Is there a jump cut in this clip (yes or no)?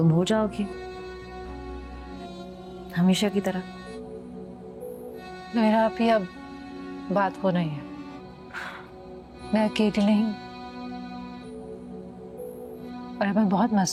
no